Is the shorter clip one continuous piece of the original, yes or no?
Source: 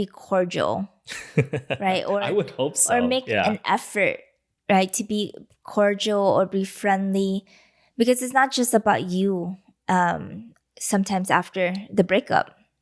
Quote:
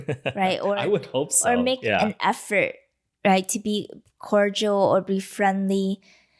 yes